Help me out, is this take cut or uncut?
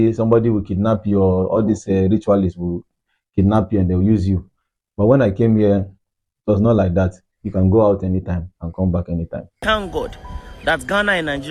cut